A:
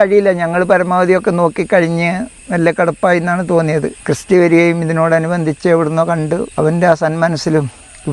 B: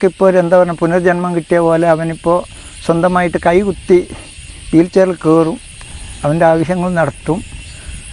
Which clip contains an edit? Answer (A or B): A